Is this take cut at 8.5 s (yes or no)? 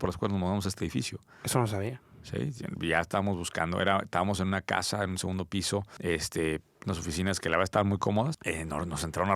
yes